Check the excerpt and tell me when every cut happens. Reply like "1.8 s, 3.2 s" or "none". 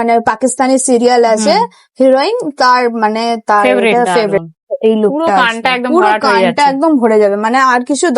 4.5 s